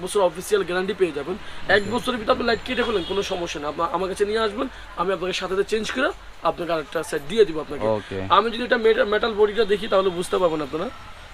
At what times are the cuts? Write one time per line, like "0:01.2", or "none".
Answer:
none

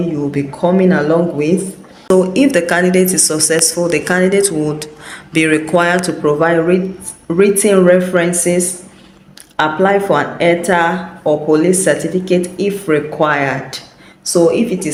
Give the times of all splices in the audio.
none

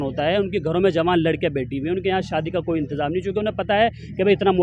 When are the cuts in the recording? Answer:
none

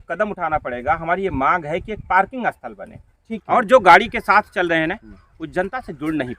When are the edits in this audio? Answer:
0:03.2

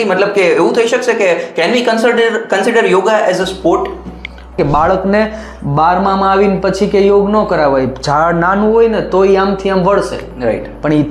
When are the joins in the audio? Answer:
0:04.6

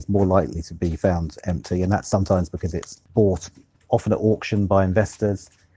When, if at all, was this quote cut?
0:03.0

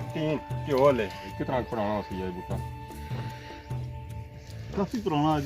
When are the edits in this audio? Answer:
0:01.3

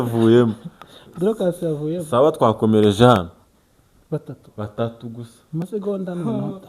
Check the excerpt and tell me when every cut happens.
none

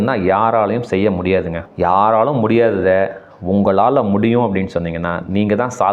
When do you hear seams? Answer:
0:01.6

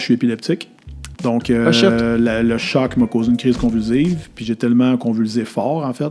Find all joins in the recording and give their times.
none

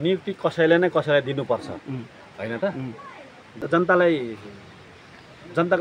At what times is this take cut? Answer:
0:03.6

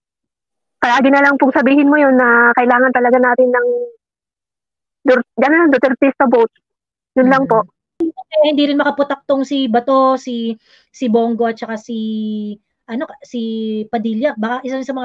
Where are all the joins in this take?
0:07.9

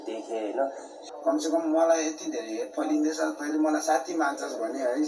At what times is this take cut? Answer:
0:01.1

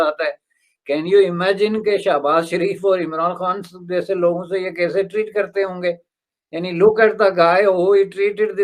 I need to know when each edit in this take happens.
none

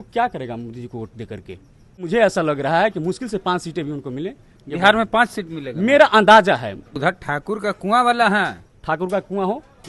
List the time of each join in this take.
0:02.0
0:06.9
0:08.7

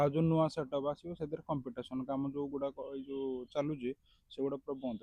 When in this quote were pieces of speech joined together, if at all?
none

